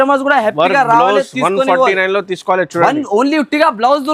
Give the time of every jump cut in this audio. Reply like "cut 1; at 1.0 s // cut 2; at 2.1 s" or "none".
none